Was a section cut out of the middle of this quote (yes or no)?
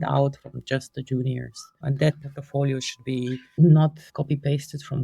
yes